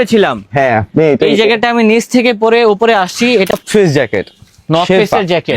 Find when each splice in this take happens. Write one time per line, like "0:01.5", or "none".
0:03.5